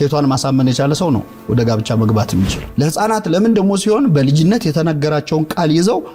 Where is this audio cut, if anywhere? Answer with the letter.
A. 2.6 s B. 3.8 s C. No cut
A